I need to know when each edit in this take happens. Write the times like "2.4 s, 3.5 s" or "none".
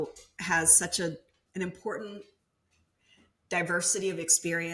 1.4 s